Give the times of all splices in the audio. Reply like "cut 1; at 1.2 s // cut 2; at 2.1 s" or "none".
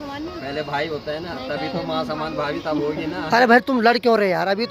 none